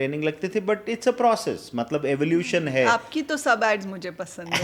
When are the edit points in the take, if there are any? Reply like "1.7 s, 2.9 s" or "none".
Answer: none